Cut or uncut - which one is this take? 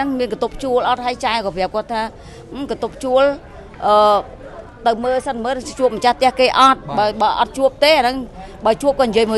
uncut